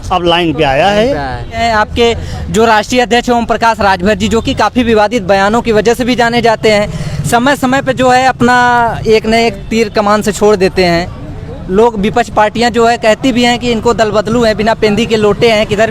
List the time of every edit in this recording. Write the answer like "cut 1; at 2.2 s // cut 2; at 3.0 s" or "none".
cut 1; at 1.6 s